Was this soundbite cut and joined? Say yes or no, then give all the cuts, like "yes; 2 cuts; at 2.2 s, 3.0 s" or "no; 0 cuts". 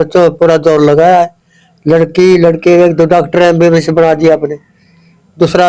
no; 0 cuts